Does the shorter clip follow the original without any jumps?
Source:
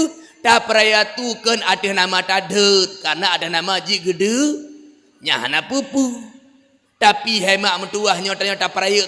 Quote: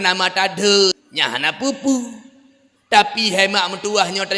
no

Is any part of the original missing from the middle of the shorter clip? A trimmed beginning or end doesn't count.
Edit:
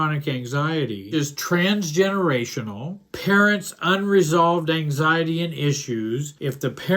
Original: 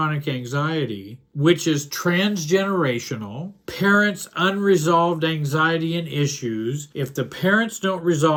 yes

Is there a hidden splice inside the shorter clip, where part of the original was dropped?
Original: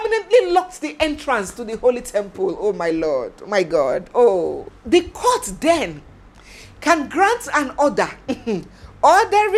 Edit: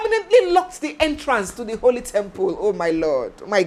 no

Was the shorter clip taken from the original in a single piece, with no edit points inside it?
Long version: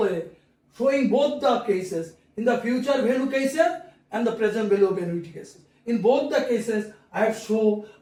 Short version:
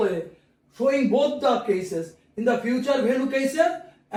yes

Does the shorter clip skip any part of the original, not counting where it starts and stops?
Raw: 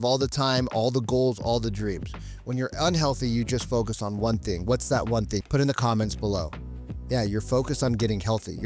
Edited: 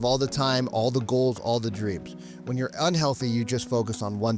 no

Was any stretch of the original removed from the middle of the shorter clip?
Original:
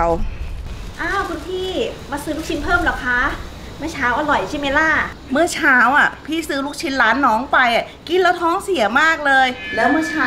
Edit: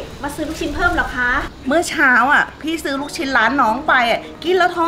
yes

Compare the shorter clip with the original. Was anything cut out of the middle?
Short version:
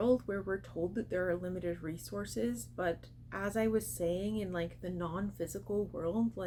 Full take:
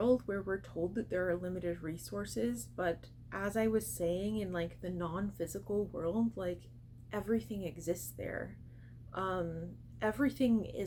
no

